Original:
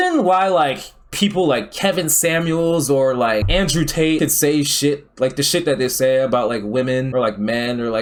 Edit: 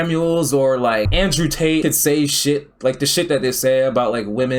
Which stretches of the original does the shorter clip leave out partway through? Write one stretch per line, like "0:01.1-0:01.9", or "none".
none